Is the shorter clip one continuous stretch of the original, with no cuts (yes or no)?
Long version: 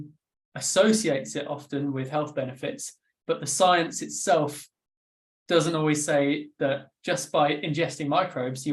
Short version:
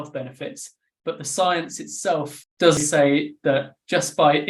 no